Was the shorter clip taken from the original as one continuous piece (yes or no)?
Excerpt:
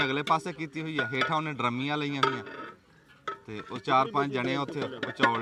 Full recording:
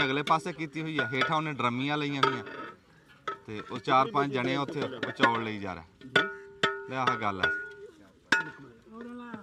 yes